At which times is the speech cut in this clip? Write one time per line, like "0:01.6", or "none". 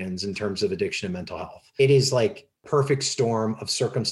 0:01.8
0:02.6